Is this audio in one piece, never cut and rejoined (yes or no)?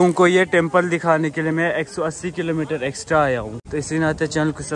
no